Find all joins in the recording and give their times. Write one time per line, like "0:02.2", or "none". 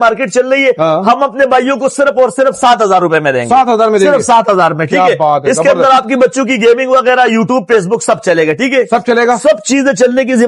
none